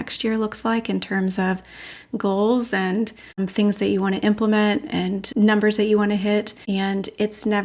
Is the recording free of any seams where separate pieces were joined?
no; 3 cuts; at 3.4 s, 5.2 s, 6.6 s

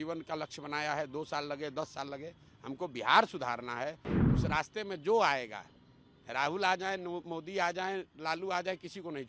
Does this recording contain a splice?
yes; 1 cut; at 4.1 s

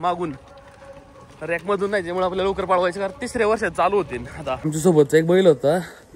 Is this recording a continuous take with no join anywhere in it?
no; 1 cut; at 4.6 s

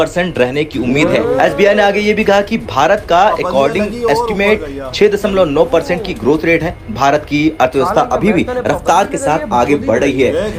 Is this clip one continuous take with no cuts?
yes; 0 cuts

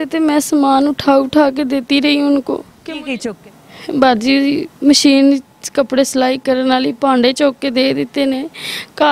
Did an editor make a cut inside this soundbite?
yes; 1 cut; at 3.2 s

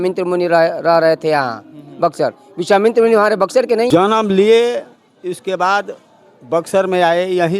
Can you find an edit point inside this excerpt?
yes; 1 cut; at 3.9 s

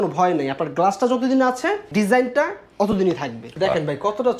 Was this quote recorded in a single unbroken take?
no; 2 cuts; at 1.9 s, 3.5 s

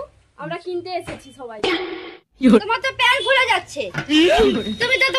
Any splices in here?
yes; 1 cut; at 2.6 s

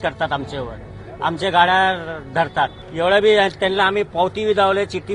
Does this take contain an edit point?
yes; 1 cut; at 2.8 s

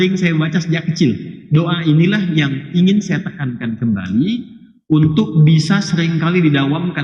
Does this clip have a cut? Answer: yes; 1 cut; at 1.3 s

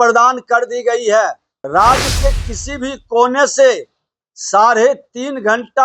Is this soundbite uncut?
no; 1 cut; at 1.5 s

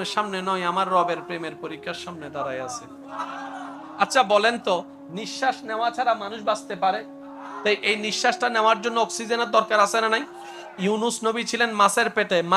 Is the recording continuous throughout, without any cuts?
no; 2 cuts; at 3.8 s, 7.5 s

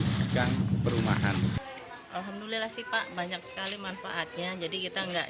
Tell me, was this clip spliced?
yes; 1 cut; at 1.6 s

